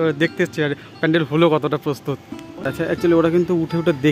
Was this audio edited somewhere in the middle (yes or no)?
yes